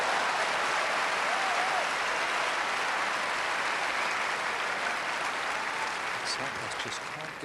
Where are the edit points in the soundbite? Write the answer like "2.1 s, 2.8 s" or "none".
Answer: 5.3 s

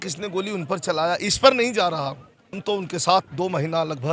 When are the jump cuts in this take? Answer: 2.6 s

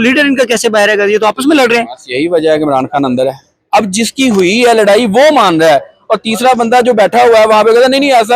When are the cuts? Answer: 3.5 s

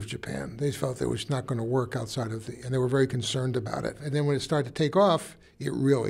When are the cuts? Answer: 4.0 s

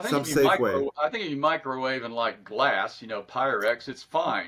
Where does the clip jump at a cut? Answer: none

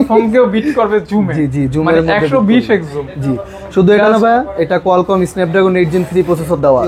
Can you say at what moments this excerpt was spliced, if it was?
none

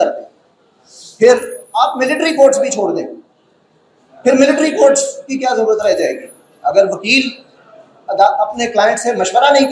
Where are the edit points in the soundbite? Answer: none

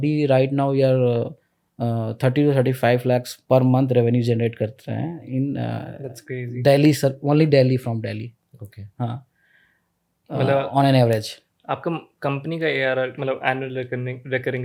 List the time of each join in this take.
none

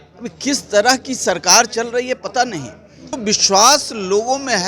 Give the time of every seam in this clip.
3.2 s

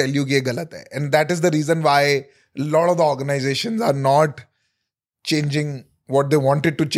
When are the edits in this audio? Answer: none

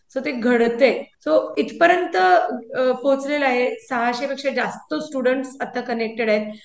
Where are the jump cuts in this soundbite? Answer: 1.1 s

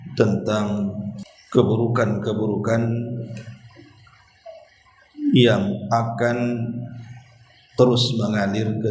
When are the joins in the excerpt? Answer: 1.1 s

